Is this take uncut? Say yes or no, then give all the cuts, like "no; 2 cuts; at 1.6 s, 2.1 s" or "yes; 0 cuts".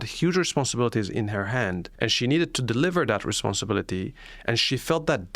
no; 1 cut; at 1.9 s